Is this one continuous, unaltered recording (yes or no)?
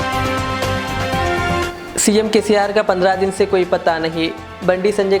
no